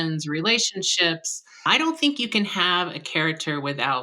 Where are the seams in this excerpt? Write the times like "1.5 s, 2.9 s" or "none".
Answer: 1.6 s